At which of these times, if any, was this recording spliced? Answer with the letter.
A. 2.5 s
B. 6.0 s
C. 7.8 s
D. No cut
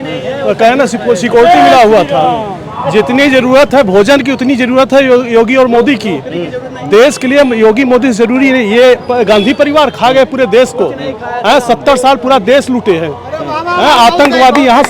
D